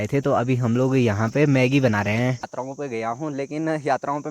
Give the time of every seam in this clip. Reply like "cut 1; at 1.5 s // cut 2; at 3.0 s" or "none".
cut 1; at 2.6 s